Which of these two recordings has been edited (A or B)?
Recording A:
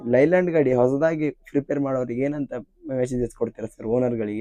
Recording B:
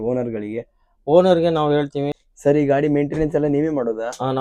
B